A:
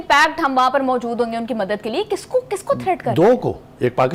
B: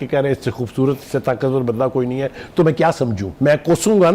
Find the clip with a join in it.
B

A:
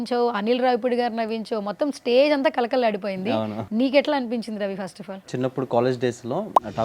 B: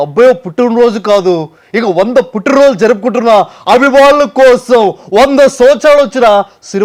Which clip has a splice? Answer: A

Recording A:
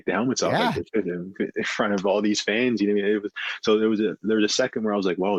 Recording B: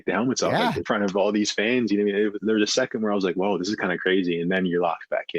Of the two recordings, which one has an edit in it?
B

